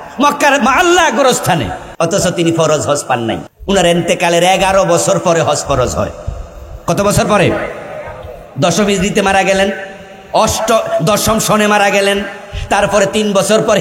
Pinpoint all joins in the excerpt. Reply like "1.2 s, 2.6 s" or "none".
1.8 s, 3.5 s